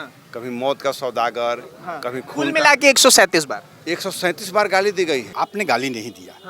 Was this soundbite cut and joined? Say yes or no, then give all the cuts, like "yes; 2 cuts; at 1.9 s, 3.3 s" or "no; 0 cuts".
yes; 1 cut; at 5.3 s